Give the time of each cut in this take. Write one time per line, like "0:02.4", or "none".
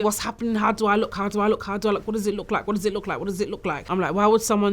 0:03.8